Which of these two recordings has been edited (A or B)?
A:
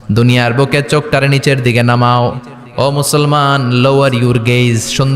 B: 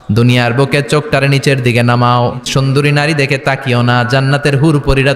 B